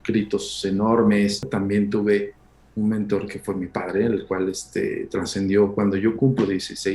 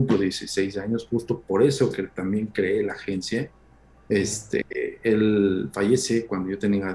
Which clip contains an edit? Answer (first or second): first